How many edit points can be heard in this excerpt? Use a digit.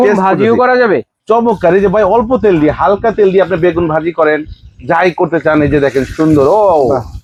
0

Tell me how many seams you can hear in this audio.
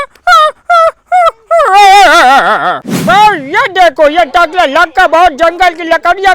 1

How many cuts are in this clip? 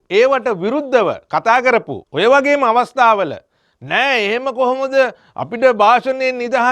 1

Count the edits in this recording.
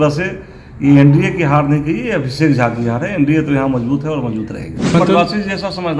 1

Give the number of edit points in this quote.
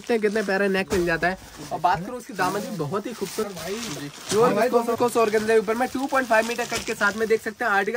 2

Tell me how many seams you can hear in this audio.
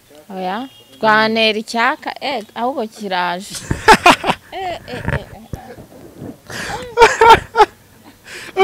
0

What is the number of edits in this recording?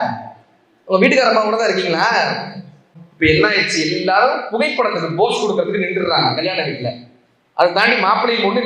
1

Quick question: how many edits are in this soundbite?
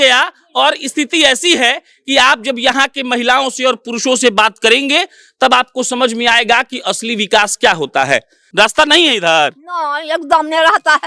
1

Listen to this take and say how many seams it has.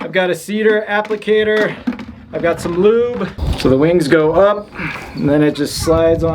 1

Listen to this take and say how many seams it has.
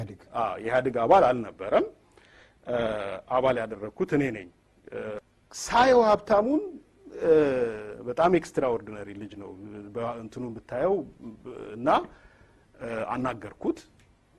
1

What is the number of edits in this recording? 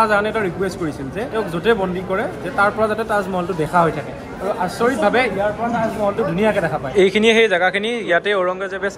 2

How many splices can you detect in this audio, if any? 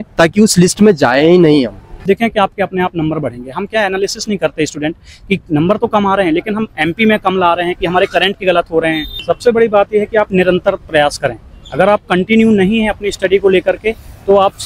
2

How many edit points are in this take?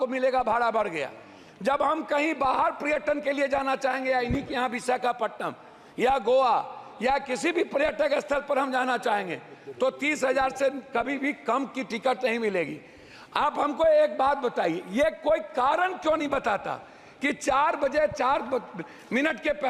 0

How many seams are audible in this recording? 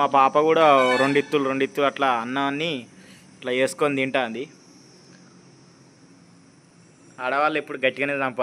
0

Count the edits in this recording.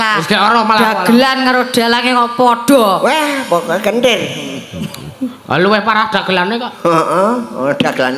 0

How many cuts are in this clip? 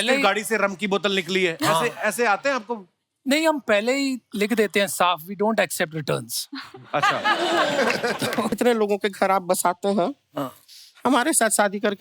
1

